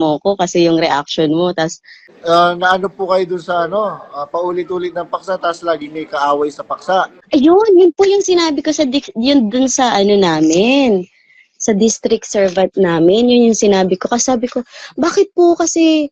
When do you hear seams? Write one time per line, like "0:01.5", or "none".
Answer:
0:02.1